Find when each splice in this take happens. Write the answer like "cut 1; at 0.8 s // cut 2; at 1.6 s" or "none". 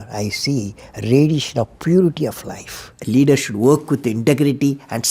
cut 1; at 2.9 s

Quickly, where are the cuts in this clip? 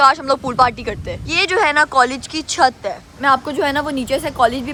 none

